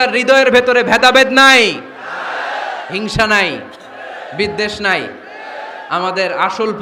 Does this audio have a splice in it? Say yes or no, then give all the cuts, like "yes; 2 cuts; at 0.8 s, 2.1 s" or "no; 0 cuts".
no; 0 cuts